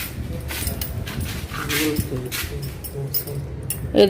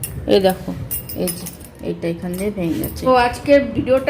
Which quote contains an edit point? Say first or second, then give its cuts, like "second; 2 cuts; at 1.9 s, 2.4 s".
second; 1 cut; at 3.1 s